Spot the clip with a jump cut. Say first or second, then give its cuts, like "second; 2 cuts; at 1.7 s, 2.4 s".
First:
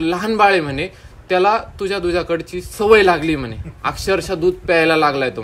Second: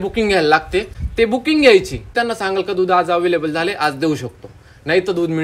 second; 2 cuts; at 1.0 s, 2.1 s